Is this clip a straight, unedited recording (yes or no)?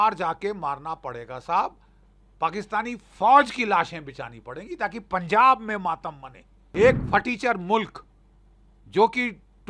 no